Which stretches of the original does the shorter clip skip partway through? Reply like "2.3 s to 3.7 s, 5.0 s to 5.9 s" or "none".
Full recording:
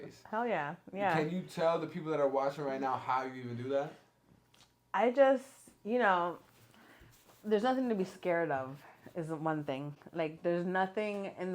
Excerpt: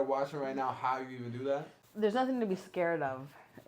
4.0 s to 7.3 s